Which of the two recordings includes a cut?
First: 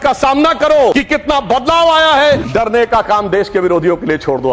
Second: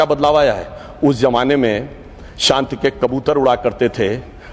first; 2 cuts; at 0.9 s, 2.4 s

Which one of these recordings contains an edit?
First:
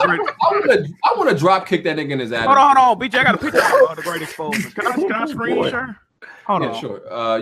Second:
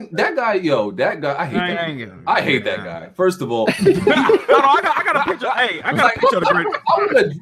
first; 1 cut; at 2.2 s

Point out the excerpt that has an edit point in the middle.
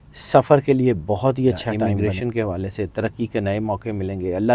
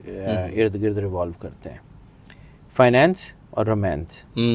first; 1 cut; at 1.9 s

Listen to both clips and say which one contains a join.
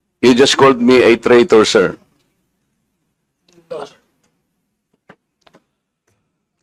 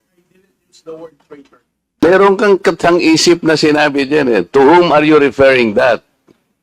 second; 1 cut; at 1.9 s

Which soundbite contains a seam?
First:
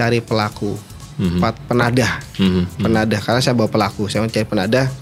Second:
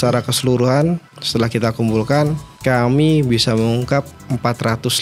second; 2 cuts; at 1.1 s, 2.5 s

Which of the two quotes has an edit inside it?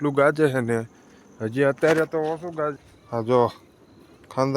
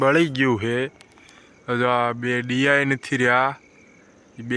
first; 1 cut; at 2.8 s

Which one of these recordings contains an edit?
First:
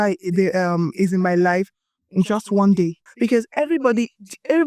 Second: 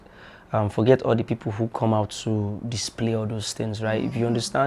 first; 1 cut; at 3.0 s

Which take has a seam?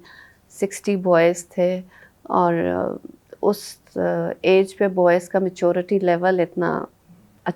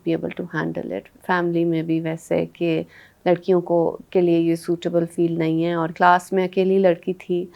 second; 2 cuts; at 1.1 s, 5.9 s

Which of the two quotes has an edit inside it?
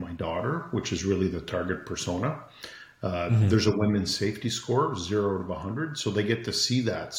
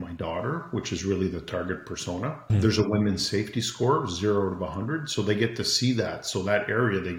second; 1 cut; at 2.5 s

